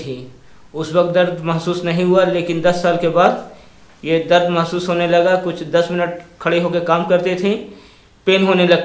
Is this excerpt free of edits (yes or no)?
yes